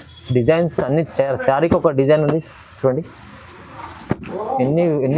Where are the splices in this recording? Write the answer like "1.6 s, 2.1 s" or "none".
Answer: none